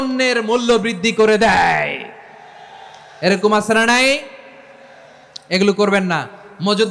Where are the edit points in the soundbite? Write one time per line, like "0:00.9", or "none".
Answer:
none